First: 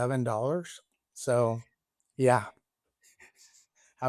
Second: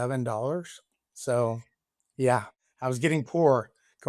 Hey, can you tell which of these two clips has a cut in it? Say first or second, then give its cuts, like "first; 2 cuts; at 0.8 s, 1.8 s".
second; 1 cut; at 2.6 s